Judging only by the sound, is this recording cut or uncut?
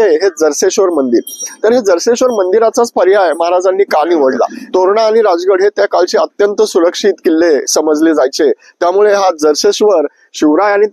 cut